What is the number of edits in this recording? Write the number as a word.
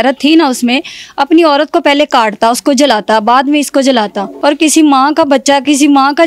one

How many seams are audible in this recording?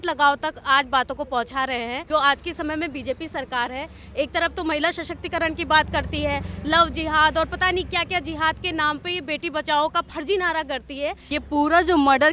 two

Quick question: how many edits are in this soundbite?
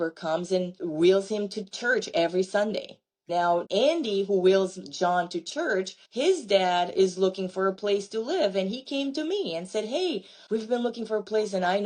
one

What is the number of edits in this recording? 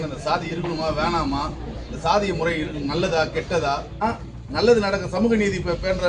one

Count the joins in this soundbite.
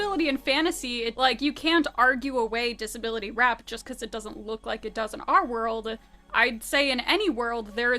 one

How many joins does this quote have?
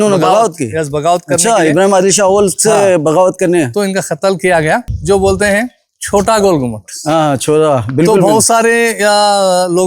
one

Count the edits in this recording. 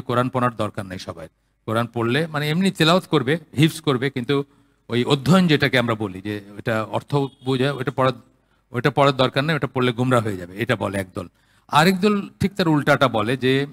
zero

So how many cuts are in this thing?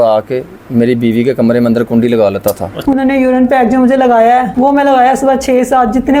one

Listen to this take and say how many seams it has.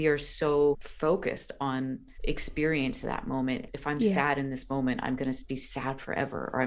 three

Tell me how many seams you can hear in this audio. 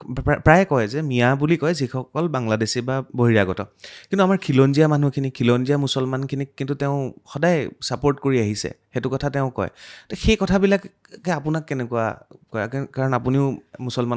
zero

